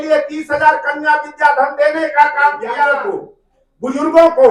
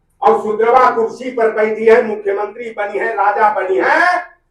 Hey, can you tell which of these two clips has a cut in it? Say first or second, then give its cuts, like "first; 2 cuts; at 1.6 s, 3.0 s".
first; 1 cut; at 2.8 s